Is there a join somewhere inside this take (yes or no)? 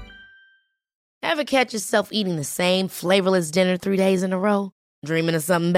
no